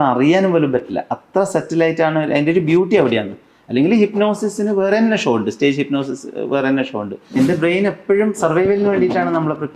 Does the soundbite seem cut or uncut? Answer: cut